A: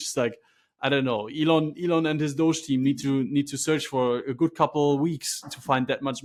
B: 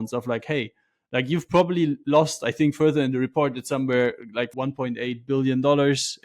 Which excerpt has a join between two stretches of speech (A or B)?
B